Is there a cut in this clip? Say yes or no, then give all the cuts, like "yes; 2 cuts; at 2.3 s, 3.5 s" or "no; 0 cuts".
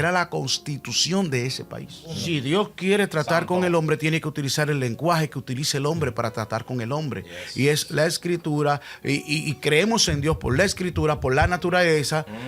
yes; 1 cut; at 2.2 s